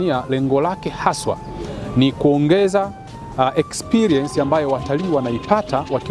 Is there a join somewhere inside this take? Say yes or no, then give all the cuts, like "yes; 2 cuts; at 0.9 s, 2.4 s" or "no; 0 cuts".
no; 0 cuts